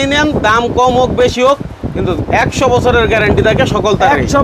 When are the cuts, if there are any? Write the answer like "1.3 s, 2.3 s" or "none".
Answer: none